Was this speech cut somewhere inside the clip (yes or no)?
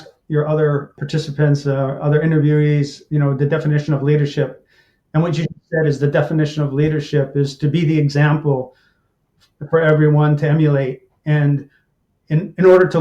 yes